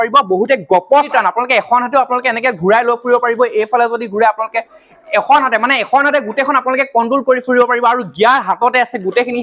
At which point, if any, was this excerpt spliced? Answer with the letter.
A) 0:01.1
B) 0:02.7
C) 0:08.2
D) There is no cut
A